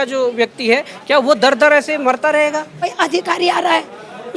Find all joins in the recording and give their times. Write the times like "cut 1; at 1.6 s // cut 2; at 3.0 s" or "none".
cut 1; at 2.9 s